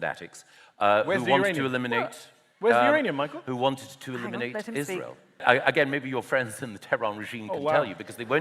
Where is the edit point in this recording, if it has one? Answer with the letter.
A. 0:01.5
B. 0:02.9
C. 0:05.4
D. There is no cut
C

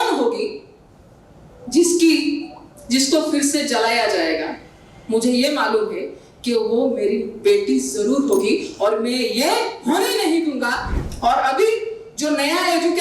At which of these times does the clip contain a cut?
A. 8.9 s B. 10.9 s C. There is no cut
B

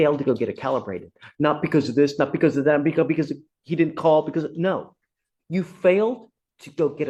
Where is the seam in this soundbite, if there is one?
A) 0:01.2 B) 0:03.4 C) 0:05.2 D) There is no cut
D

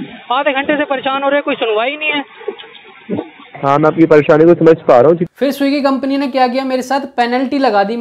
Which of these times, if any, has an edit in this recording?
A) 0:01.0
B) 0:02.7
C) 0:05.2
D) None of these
C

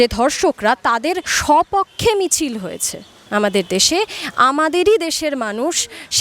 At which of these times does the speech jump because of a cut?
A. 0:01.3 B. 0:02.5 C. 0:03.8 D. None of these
A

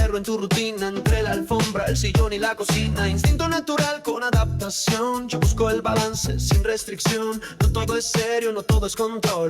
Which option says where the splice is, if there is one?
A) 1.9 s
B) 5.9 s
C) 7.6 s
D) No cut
D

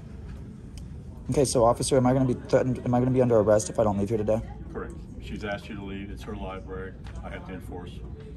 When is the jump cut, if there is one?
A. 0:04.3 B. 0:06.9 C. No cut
B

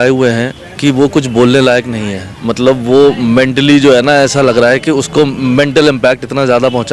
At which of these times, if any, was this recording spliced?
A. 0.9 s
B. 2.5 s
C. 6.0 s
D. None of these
D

